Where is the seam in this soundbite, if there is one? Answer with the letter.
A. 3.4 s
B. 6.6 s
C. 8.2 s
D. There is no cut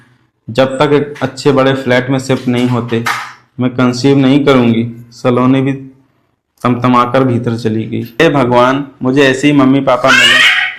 C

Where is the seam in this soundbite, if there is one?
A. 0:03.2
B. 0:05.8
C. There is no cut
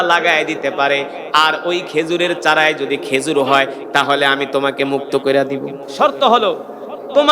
B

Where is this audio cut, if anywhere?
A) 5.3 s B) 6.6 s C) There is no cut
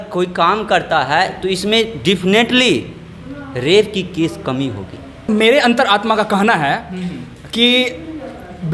A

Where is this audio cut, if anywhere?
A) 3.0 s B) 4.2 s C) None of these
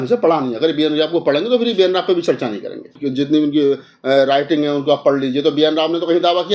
A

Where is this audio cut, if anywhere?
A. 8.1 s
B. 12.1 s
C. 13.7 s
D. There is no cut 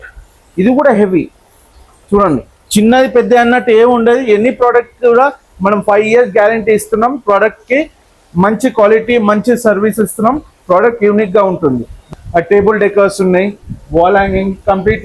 B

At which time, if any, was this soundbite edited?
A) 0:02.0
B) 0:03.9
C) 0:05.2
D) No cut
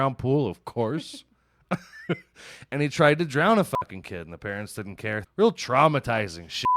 C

